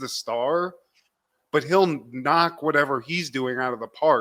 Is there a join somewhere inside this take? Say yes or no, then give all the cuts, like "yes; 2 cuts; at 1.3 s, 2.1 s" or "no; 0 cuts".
no; 0 cuts